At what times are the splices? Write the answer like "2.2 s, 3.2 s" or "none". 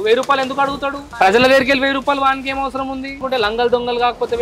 3.2 s